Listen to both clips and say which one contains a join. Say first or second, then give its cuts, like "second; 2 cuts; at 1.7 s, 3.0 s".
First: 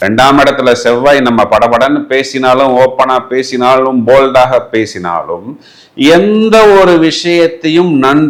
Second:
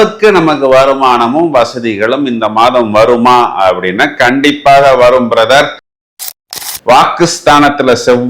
second; 1 cut; at 6.2 s